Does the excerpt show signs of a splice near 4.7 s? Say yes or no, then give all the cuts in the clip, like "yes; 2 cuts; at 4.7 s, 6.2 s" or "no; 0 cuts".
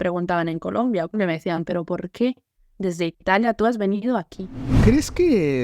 yes; 2 cuts; at 1.1 s, 4.7 s